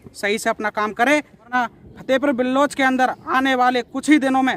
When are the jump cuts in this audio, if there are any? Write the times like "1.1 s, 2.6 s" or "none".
1.5 s